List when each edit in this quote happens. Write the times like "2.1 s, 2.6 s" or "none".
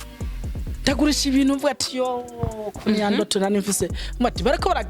none